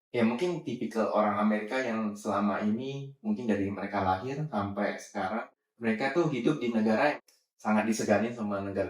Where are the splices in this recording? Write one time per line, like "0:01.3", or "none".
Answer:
0:05.5
0:07.2